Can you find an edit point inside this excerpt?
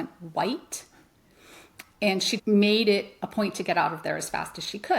yes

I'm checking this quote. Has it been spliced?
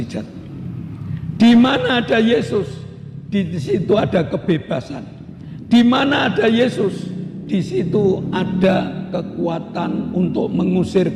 no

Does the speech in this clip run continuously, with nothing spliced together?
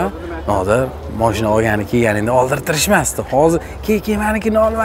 yes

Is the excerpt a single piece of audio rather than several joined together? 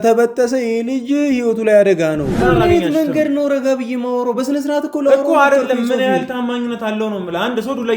no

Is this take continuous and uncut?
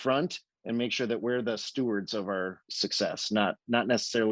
no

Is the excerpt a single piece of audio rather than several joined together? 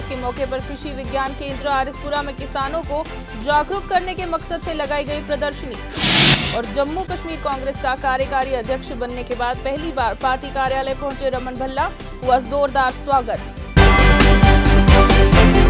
yes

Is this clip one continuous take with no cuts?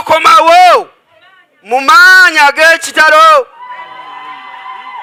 yes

